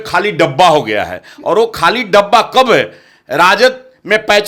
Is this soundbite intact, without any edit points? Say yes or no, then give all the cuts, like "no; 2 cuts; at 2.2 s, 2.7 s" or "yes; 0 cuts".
yes; 0 cuts